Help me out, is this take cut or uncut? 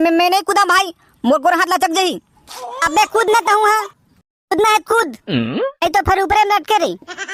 uncut